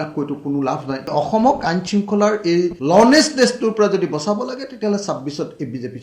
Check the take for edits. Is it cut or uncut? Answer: cut